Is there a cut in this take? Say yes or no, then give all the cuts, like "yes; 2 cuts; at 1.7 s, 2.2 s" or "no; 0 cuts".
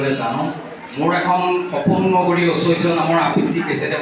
no; 0 cuts